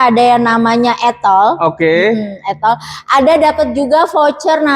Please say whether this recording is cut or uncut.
uncut